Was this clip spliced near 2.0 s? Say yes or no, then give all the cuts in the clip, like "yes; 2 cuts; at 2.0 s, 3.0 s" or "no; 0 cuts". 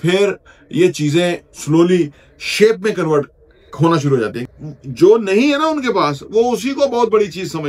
no; 1 cut; at 4.4 s